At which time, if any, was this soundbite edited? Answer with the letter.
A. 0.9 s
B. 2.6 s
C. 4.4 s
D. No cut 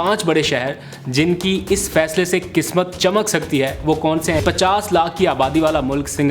C